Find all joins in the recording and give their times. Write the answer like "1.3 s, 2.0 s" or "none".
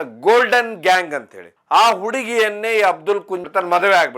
1.4 s